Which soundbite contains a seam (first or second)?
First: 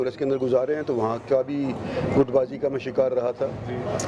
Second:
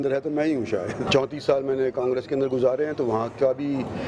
second